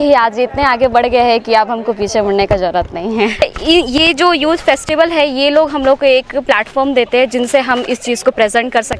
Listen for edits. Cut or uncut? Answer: cut